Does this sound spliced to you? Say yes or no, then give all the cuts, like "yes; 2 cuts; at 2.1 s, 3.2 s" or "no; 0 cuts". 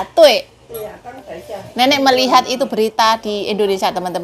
no; 0 cuts